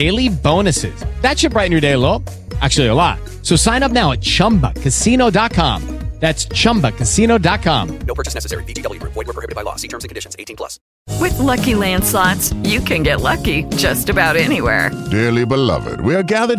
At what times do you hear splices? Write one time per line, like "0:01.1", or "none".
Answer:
0:10.9